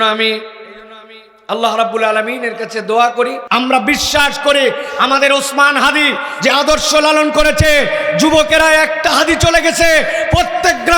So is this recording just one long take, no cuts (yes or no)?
no